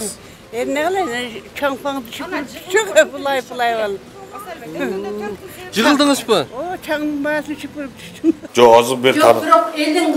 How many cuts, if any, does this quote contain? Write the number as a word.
one